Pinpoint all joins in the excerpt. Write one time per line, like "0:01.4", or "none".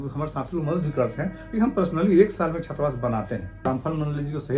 0:03.7